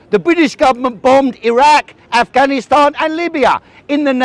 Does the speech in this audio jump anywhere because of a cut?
no; 0 cuts

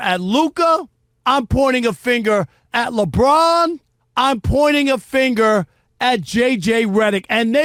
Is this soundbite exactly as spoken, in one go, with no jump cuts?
yes; 0 cuts

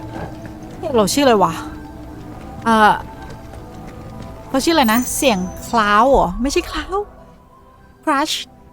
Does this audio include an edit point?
no; 0 cuts

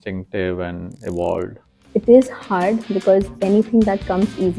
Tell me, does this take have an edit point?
yes; 1 cut; at 1.8 s

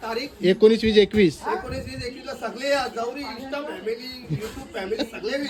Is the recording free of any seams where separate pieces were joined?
yes; 0 cuts

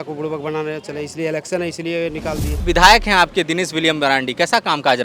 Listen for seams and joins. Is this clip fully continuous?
no; 1 cut; at 2.6 s

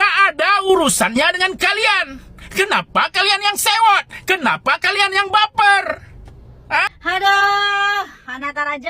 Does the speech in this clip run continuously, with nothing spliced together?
no; 1 cut; at 6.9 s

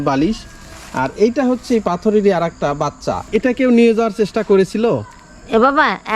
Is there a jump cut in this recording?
yes; 1 cut; at 3.1 s

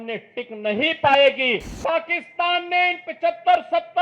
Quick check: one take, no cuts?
no; 1 cut; at 1.7 s

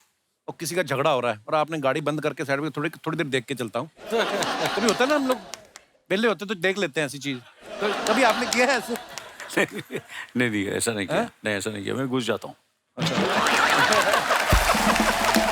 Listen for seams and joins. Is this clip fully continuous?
yes; 0 cuts

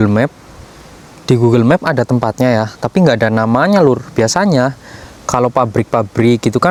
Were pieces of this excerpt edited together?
no; 0 cuts

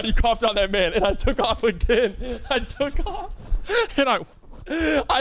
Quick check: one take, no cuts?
yes; 0 cuts

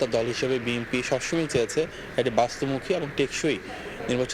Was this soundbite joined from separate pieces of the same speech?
no; 0 cuts

